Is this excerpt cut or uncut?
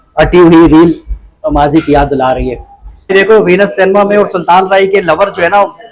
cut